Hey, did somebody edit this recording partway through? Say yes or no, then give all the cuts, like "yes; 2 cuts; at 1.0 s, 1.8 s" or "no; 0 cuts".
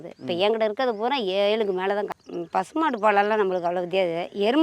yes; 1 cut; at 2.1 s